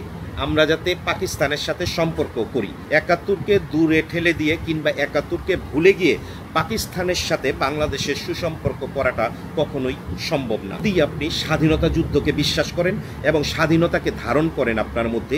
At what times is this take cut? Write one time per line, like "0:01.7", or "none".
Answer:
0:02.8
0:11.1